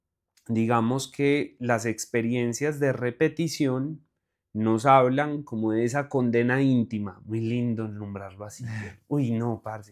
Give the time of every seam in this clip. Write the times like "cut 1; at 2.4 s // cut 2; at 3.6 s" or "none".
none